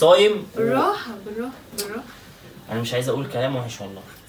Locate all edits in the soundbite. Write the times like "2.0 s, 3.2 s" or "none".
none